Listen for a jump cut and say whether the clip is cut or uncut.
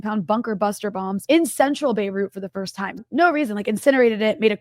cut